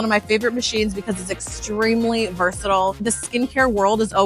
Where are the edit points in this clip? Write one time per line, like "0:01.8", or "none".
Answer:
0:03.0